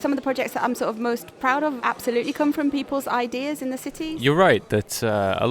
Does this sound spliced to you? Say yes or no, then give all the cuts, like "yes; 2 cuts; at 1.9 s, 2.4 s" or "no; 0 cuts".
yes; 1 cut; at 4.1 s